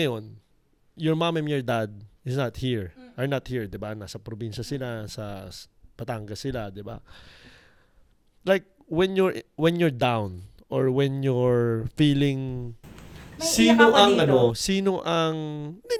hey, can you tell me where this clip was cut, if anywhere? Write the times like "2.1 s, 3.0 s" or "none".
none